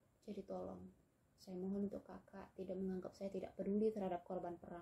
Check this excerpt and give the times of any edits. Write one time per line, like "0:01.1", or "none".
none